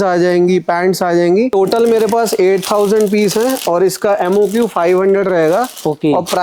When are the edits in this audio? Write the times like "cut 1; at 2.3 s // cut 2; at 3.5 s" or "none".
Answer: cut 1; at 1.5 s